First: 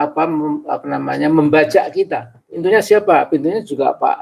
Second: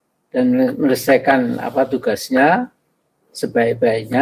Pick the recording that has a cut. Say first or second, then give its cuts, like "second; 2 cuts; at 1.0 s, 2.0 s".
first; 1 cut; at 2.6 s